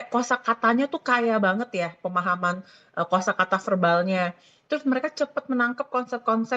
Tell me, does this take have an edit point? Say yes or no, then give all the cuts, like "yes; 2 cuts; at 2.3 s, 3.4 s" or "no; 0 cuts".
no; 0 cuts